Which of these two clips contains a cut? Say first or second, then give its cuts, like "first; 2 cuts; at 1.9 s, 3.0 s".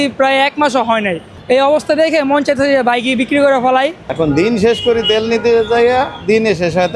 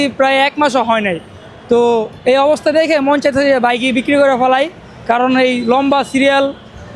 first; 2 cuts; at 1.4 s, 4.0 s